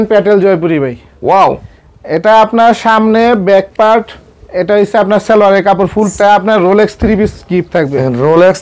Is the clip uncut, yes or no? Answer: no